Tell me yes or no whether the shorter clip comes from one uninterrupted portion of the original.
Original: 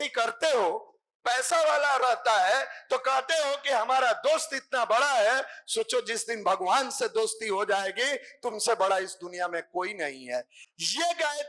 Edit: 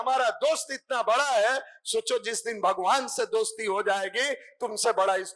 yes